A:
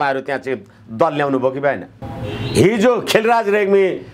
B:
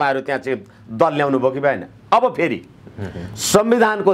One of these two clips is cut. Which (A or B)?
A